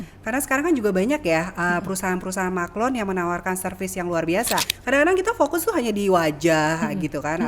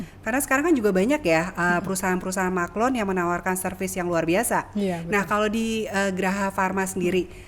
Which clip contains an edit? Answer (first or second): first